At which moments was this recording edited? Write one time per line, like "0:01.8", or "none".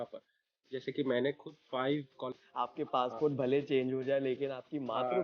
0:02.3